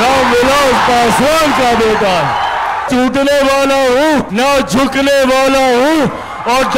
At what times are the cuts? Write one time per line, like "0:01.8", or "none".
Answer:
0:02.9
0:04.3

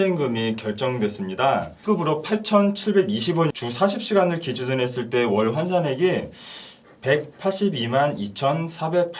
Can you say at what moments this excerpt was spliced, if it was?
0:01.8
0:03.5

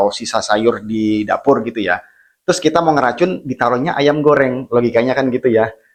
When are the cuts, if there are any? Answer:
none

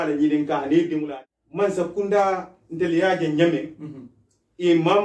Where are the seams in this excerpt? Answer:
0:01.1

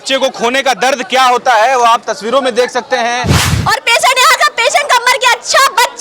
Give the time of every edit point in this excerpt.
0:03.5

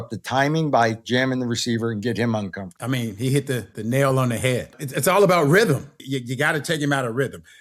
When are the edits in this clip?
0:02.7
0:03.7
0:04.8
0:06.0

